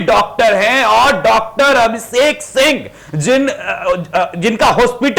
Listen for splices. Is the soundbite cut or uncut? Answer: uncut